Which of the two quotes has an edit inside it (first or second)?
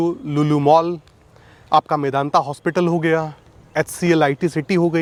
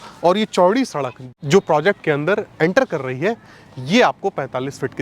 second